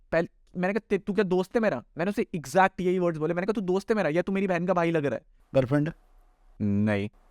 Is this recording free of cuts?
no; 1 cut; at 5.3 s

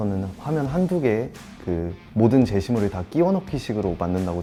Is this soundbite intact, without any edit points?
yes; 0 cuts

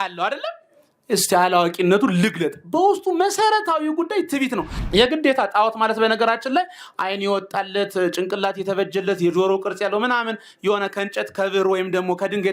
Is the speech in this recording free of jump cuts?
no; 1 cut; at 4.8 s

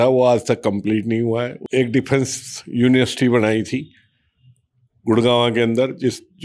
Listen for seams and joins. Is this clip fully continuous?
no; 1 cut; at 1.6 s

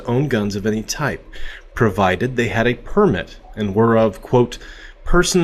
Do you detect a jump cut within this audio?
no; 0 cuts

